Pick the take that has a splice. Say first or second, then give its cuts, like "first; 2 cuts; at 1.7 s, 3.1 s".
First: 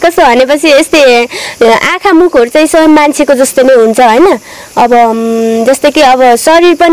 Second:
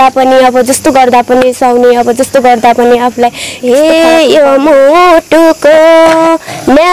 second; 1 cut; at 3.5 s